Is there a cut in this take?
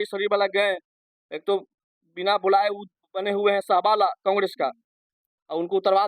no; 0 cuts

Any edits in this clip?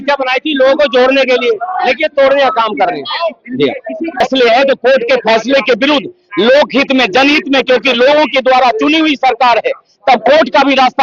yes; 1 cut; at 4.2 s

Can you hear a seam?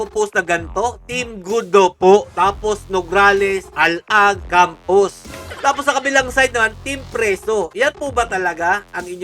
no; 0 cuts

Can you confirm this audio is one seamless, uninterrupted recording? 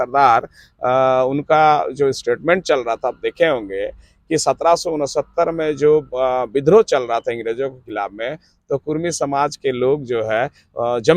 yes; 0 cuts

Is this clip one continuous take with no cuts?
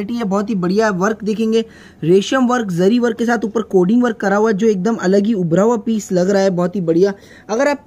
yes; 0 cuts

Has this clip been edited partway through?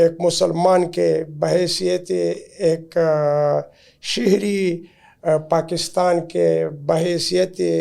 no; 0 cuts

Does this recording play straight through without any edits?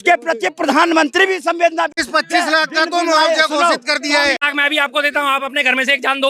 no; 2 cuts; at 2.0 s, 4.3 s

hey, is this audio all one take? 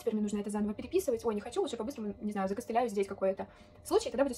yes; 0 cuts

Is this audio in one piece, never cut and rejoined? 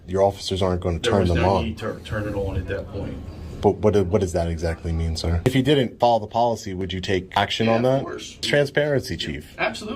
no; 3 cuts; at 5.5 s, 7.4 s, 8.4 s

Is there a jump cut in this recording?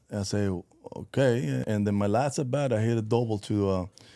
yes; 1 cut; at 1.6 s

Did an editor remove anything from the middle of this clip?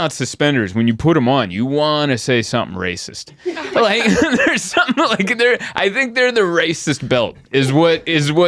no; 0 cuts

